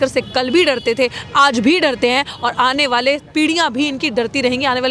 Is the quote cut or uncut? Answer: uncut